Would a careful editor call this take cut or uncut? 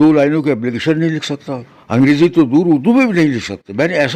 uncut